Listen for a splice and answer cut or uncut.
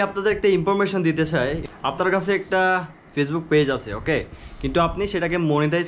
cut